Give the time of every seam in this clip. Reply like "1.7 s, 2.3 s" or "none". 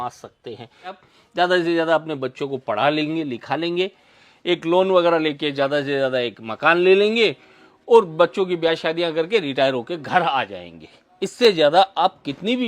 1.0 s